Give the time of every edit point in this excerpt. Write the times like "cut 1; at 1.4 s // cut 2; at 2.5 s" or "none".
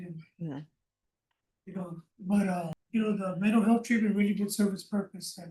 cut 1; at 2.8 s

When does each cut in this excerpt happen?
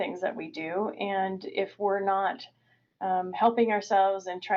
none

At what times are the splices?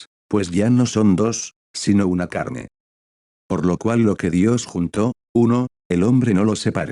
none

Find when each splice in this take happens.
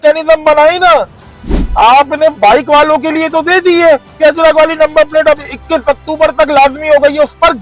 none

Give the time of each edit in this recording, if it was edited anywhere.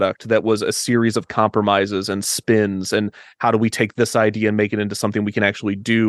none

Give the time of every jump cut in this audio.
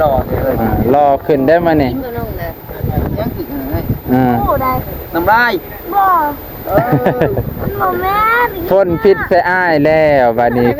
none

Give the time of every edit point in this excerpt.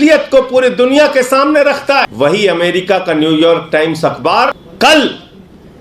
cut 1; at 2.1 s // cut 2; at 4.6 s

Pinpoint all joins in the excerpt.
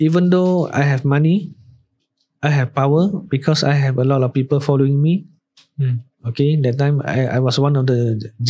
none

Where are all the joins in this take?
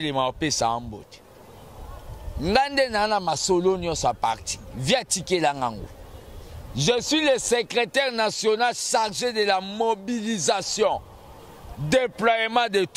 none

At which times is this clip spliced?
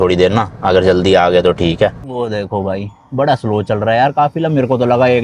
cut 1; at 2.1 s

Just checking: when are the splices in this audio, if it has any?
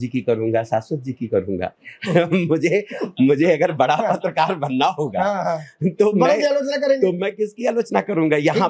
none

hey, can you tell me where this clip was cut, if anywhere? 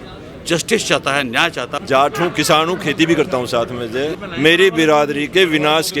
cut 1; at 1.7 s // cut 2; at 4.2 s

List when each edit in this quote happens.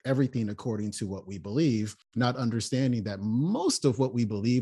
none

